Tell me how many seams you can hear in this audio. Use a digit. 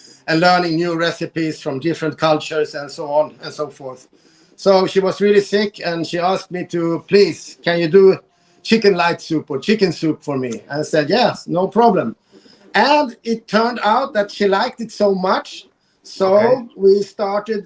0